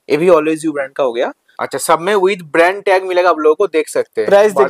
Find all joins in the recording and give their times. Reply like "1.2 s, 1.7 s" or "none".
1.5 s